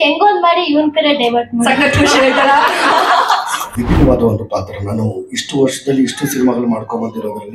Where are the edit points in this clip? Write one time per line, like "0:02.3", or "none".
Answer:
0:03.6